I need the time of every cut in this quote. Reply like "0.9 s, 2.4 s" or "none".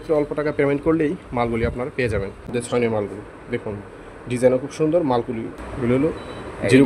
2.5 s, 5.5 s

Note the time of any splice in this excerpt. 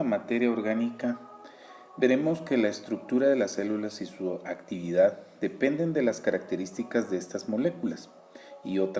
none

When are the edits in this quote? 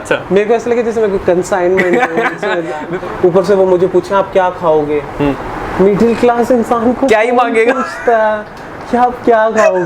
2.9 s

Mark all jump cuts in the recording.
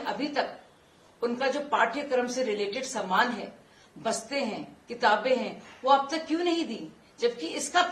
none

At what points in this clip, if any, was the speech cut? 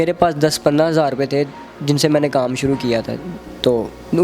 none

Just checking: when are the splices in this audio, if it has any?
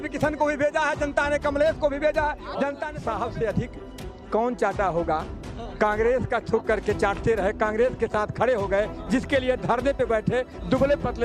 2.9 s

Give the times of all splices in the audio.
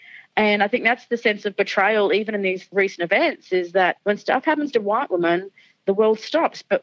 4.0 s

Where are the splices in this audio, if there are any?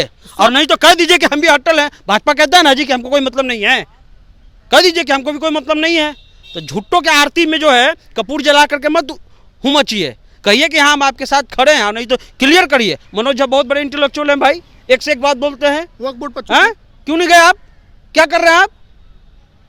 none

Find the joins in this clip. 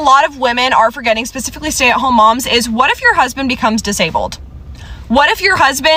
none

